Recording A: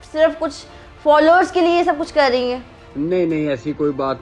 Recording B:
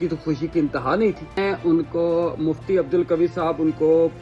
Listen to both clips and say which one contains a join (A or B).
B